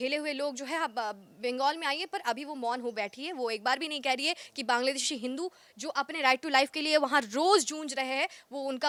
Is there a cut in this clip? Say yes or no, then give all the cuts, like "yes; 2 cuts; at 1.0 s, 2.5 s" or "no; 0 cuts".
no; 0 cuts